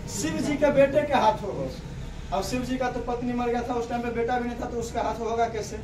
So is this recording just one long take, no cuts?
yes; 0 cuts

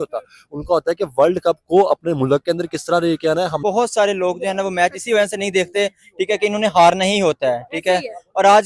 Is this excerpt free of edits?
no; 1 cut; at 3.6 s

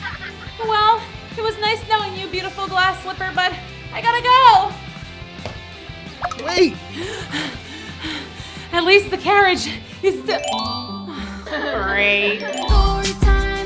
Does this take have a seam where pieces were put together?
yes; 2 cuts; at 6.9 s, 12.7 s

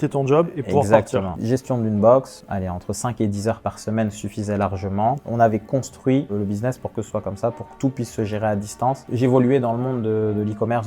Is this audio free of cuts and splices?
no; 4 cuts; at 1.3 s, 2.4 s, 5.2 s, 9.1 s

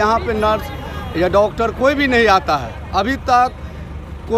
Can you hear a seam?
no; 0 cuts

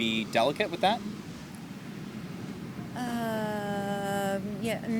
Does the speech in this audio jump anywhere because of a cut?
no; 0 cuts

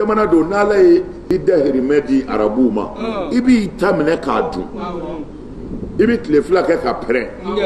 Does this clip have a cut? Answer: yes; 1 cut; at 1.2 s

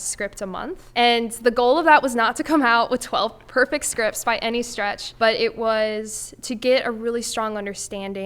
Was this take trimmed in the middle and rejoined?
yes; 2 cuts; at 0.8 s, 5.0 s

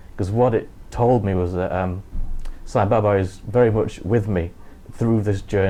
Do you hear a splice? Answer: no; 0 cuts

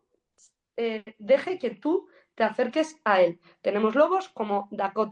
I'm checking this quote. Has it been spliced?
no; 0 cuts

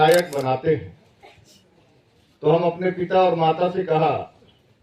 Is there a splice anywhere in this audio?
no; 0 cuts

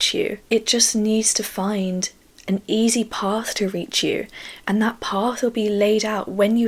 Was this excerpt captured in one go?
yes; 0 cuts

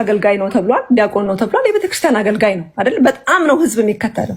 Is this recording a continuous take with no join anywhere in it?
yes; 0 cuts

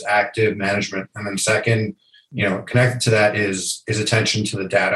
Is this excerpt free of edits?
yes; 0 cuts

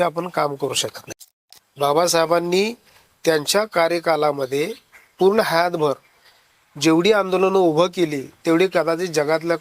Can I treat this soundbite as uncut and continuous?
no; 1 cut; at 1.2 s

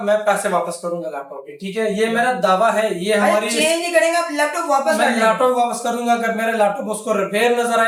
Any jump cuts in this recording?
no; 0 cuts

